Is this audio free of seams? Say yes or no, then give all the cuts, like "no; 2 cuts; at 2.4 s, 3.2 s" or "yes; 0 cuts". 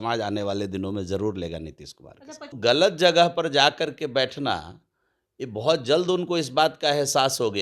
no; 1 cut; at 2.6 s